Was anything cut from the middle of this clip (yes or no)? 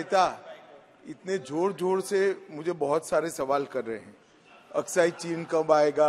no